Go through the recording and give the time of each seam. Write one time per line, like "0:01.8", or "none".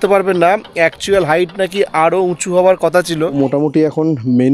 0:03.3